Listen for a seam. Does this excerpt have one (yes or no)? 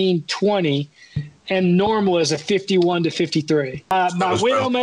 yes